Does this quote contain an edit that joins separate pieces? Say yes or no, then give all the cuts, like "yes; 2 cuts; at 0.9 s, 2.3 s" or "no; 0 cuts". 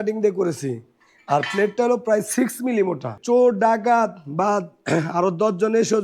yes; 1 cut; at 3.1 s